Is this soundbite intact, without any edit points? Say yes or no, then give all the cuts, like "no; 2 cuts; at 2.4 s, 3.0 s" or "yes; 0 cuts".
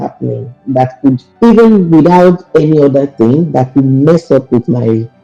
no; 1 cut; at 1.3 s